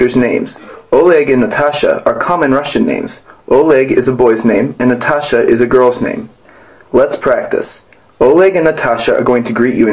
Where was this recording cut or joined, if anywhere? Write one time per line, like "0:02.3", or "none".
0:04.5